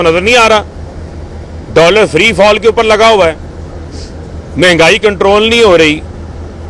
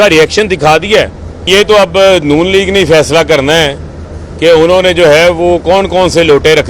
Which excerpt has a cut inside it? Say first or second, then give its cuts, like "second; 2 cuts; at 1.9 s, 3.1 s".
second; 1 cut; at 1.5 s